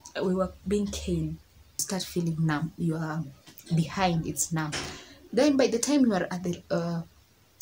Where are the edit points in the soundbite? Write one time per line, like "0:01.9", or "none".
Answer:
0:01.8